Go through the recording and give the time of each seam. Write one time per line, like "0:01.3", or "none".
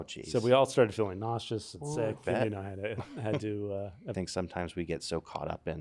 0:04.1